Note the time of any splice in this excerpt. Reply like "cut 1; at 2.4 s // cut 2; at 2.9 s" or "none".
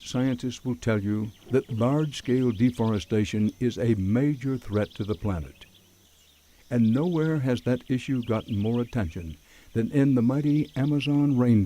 cut 1; at 10.7 s